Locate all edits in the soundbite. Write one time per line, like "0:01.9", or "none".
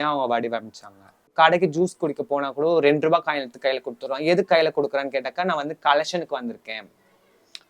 0:01.3